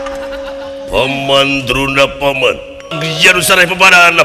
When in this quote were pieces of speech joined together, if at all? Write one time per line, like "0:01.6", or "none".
0:03.0

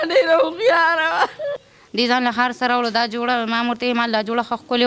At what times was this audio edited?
0:01.6

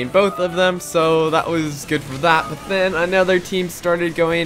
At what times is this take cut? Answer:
none

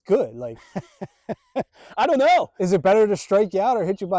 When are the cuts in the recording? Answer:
none

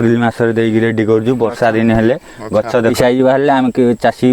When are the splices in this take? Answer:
0:02.9

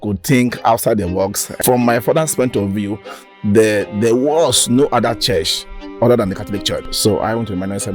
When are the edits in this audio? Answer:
0:01.5
0:06.9

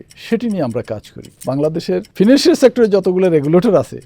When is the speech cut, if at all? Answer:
0:01.8

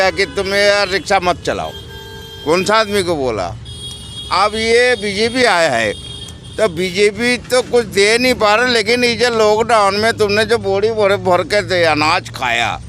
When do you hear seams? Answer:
none

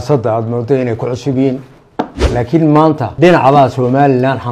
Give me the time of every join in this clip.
0:02.2
0:03.1

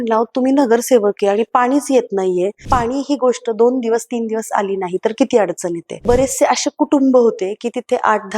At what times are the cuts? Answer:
0:02.6
0:06.0

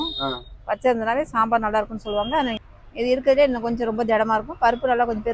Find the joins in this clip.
0:02.8

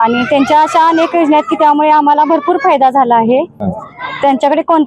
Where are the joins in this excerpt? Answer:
none

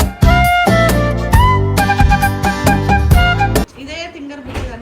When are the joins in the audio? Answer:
0:03.7

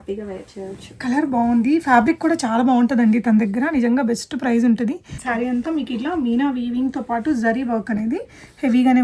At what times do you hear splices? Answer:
0:05.1

